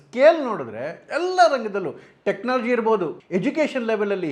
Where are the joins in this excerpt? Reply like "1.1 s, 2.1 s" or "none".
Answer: 3.2 s

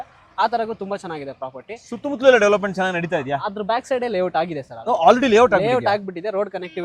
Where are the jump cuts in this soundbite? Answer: none

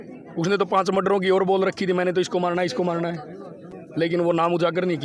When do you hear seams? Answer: none

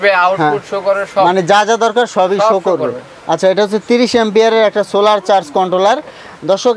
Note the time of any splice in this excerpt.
none

